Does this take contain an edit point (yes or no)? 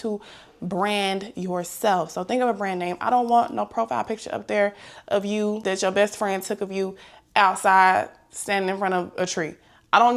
no